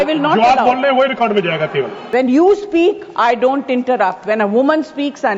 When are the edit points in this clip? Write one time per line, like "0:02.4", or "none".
0:02.0